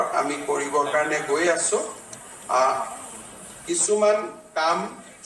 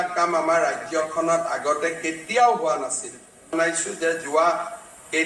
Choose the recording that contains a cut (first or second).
second